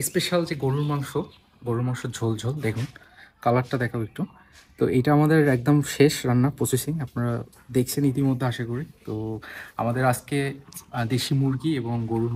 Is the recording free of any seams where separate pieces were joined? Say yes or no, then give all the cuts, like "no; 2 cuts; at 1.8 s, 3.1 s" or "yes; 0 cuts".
yes; 0 cuts